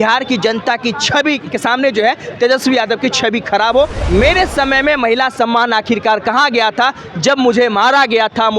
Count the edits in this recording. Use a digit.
1